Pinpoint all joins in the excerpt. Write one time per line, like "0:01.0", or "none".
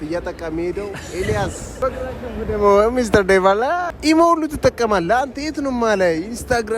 0:01.7
0:03.9